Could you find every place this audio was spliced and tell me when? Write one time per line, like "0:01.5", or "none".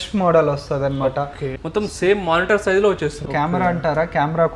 0:01.5
0:03.2

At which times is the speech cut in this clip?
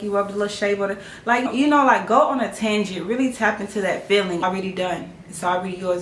0:01.5
0:04.4

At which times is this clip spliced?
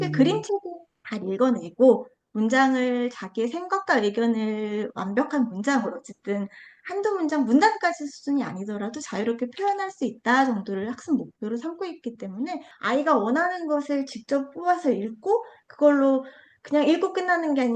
0:12.7

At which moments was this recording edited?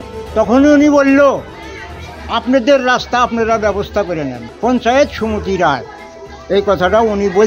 0:04.3

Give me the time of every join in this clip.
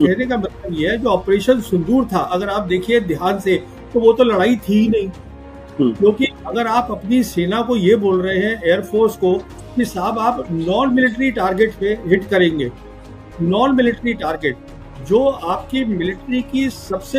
none

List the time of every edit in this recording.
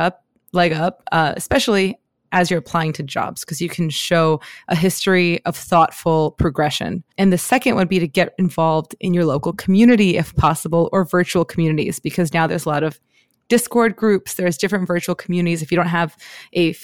0:07.1

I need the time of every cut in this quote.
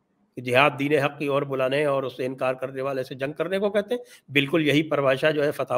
none

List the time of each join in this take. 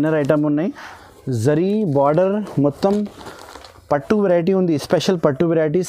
0:00.9

